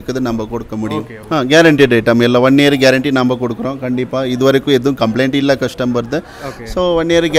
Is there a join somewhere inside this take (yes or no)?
yes